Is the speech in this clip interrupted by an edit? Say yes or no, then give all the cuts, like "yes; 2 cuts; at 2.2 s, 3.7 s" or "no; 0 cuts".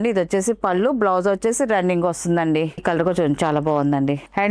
yes; 1 cut; at 2.8 s